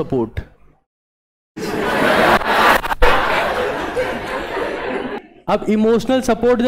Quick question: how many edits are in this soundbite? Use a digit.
1